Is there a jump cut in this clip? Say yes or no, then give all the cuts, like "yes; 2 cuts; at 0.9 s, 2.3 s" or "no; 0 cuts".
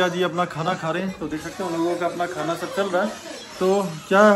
no; 0 cuts